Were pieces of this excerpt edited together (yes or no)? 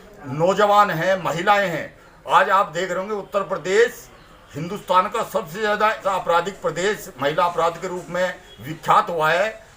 yes